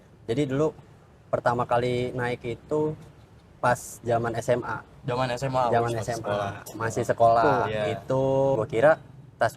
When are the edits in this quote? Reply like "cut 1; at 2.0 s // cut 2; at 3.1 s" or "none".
cut 1; at 8.6 s